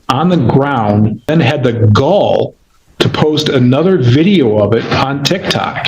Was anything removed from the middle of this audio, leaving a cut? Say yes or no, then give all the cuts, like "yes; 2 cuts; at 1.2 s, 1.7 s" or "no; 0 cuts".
yes; 1 cut; at 1.3 s